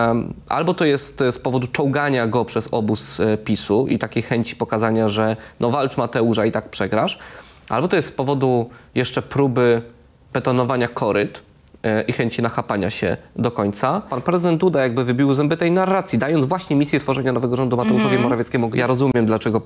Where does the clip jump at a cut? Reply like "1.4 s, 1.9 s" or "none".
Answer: 14.1 s, 18.7 s

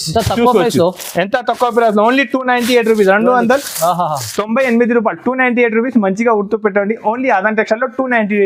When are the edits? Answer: none

